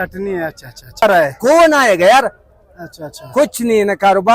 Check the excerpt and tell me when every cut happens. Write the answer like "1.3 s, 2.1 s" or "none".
1.0 s